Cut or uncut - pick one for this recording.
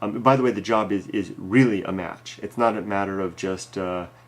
cut